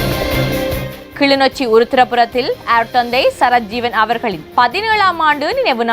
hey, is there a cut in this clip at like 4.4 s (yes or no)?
yes